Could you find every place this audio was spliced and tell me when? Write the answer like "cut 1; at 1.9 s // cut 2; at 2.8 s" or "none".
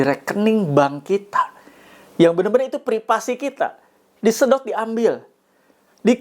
none